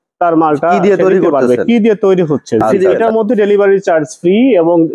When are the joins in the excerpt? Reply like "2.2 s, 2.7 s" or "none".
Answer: 2.7 s